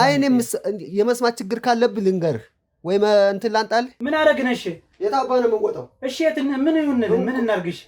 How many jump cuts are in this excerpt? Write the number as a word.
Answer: one